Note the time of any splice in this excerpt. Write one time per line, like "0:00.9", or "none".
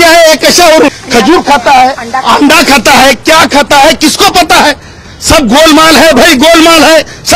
0:01.0